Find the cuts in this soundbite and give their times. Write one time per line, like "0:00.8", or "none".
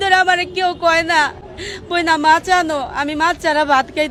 none